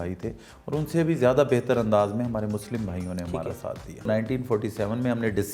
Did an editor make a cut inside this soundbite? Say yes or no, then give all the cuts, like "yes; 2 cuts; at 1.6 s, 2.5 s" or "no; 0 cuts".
yes; 1 cut; at 4.1 s